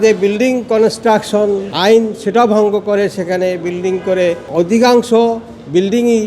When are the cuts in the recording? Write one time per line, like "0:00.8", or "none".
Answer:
0:01.7
0:04.4